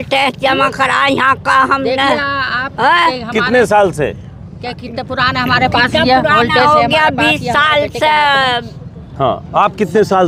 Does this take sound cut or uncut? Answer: uncut